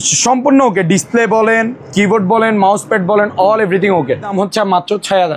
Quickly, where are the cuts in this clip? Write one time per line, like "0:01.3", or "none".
0:04.3